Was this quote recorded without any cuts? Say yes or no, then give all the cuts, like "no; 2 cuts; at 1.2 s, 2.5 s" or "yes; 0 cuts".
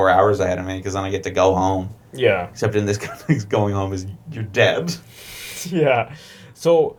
yes; 0 cuts